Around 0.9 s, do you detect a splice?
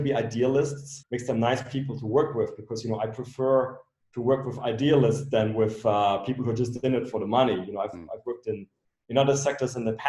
yes; 1 cut; at 0.9 s

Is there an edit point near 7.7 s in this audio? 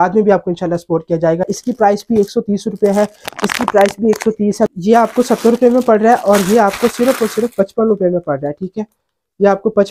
no; 2 cuts; at 1.4 s, 4.6 s

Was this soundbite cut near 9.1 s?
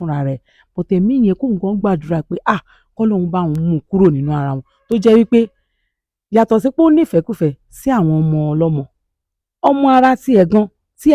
no; 0 cuts

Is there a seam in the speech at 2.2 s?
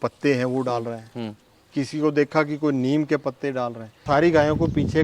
no; 1 cut; at 4.0 s

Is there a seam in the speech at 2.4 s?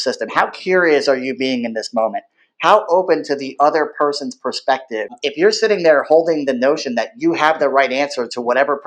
no; 1 cut; at 5.1 s

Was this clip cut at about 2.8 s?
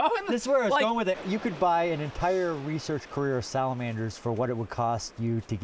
no; 1 cut; at 1.2 s

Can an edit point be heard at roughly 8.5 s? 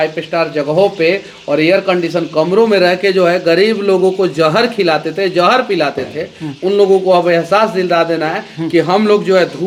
no; 0 cuts

